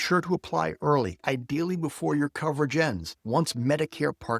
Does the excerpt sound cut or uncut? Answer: cut